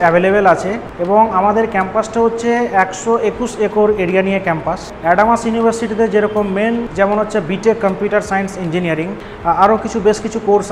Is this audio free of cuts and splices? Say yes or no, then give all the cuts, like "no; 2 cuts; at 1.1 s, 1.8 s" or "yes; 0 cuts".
no; 2 cuts; at 4.8 s, 6.9 s